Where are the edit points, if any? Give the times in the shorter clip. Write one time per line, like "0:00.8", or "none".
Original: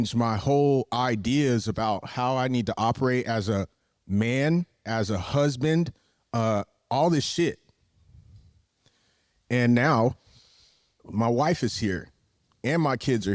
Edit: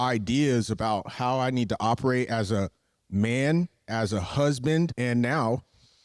0:04.9